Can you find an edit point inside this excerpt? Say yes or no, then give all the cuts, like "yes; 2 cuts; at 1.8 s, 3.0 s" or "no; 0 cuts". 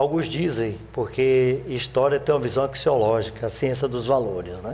yes; 1 cut; at 3.6 s